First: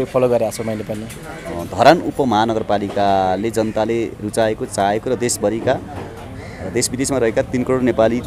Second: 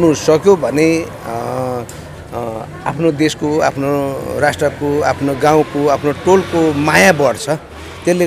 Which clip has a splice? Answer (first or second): first